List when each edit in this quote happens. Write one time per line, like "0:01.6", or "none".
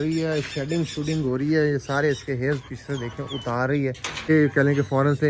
0:04.3